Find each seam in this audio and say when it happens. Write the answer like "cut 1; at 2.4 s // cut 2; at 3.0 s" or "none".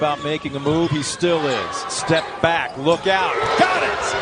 none